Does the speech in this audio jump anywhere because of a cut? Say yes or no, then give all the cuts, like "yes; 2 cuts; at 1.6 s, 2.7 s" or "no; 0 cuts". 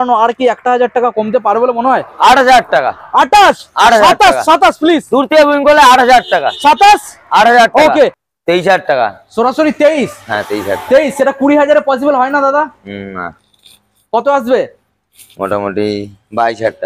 yes; 1 cut; at 8.1 s